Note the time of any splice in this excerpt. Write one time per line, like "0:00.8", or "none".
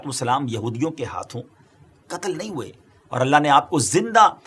none